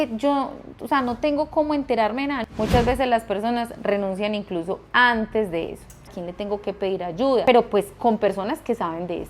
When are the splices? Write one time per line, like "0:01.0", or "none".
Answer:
0:02.4
0:06.1
0:07.4